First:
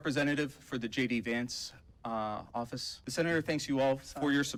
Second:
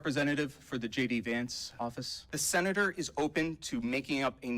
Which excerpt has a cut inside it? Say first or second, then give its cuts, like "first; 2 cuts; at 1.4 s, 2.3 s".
second; 1 cut; at 2.0 s